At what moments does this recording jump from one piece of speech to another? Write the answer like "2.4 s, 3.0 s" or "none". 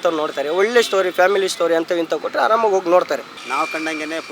3.3 s